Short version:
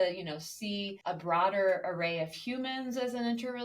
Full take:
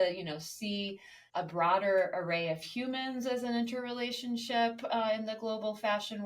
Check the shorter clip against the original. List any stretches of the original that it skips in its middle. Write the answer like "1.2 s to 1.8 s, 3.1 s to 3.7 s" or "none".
0.9 s to 1.2 s